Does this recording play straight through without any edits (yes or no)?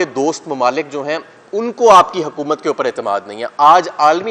yes